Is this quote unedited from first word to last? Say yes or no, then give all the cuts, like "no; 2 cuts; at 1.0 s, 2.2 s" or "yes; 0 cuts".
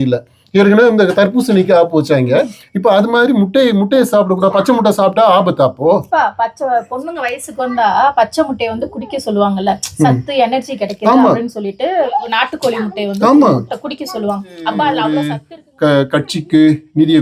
no; 1 cut; at 15.3 s